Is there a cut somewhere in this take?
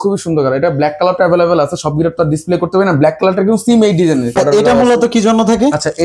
yes; 1 cut; at 4.4 s

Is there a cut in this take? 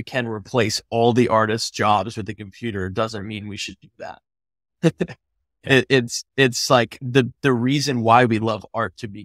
no; 0 cuts

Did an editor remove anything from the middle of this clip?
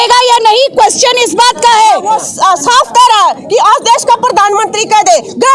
yes; 1 cut; at 2.2 s

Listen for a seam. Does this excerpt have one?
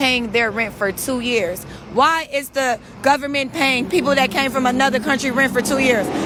no; 0 cuts

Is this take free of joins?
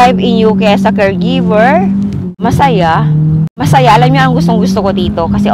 no; 2 cuts; at 2.3 s, 3.6 s

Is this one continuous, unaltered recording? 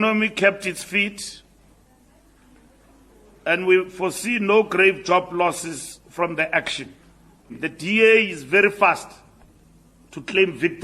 no; 1 cut; at 7.6 s

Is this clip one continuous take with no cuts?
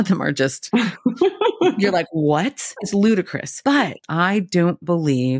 yes; 0 cuts

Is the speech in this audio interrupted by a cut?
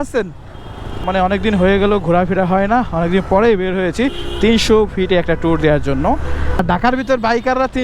yes; 2 cuts; at 1.0 s, 6.6 s

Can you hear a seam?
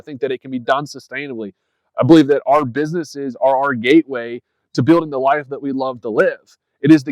no; 0 cuts

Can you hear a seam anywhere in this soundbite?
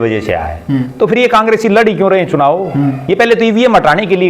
no; 0 cuts

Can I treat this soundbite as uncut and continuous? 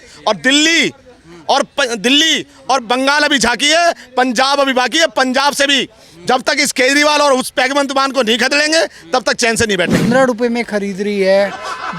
no; 1 cut; at 10.1 s

